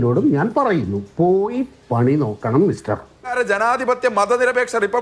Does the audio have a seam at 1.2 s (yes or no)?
no